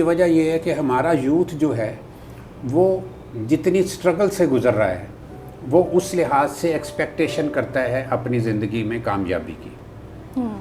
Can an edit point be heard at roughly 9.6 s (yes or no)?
no